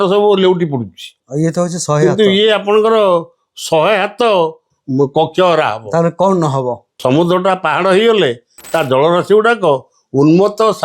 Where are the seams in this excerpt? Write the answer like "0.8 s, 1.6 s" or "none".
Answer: 1.2 s, 4.7 s, 7.0 s